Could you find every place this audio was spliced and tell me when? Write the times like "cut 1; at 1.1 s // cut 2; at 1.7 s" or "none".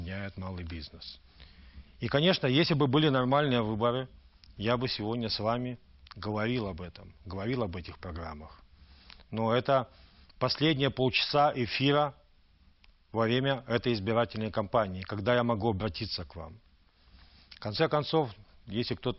cut 1; at 10.2 s